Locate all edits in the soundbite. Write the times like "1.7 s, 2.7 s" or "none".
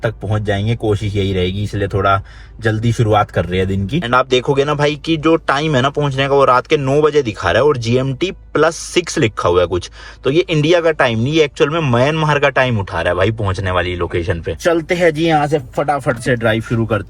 none

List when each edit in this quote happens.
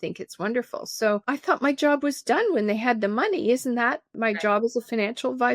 1.2 s, 4.1 s

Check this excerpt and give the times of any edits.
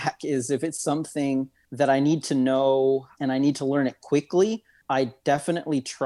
1.6 s, 3.1 s, 4.7 s

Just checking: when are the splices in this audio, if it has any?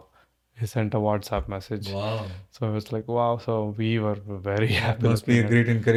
none

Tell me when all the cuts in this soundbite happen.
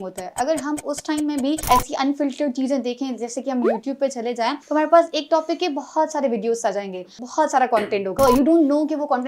1.6 s, 4.6 s, 7.2 s, 8.1 s

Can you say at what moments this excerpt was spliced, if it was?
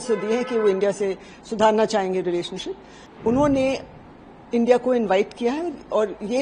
3.0 s

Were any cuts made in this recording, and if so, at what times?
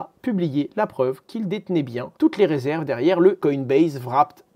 3.4 s

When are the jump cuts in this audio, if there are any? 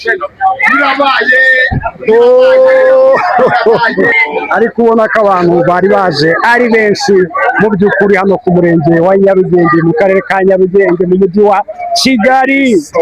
4.2 s

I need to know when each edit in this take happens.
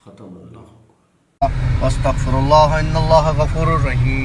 1.3 s

